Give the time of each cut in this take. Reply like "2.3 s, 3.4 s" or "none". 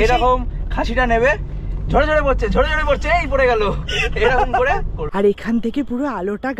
5.0 s